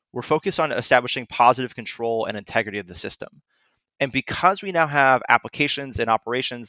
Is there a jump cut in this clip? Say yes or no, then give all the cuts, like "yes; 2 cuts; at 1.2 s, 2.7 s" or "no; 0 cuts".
no; 0 cuts